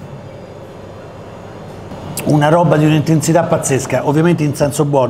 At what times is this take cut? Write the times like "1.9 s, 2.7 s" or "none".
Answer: none